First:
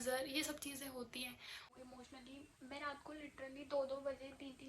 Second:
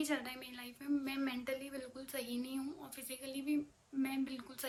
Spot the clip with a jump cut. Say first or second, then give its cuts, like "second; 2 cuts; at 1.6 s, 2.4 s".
first; 1 cut; at 1.7 s